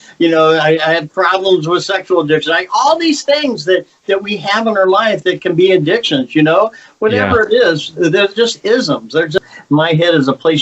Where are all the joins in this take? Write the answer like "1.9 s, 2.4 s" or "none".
9.4 s